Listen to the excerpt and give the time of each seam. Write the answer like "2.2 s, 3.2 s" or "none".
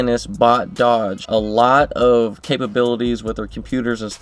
1.2 s, 2.4 s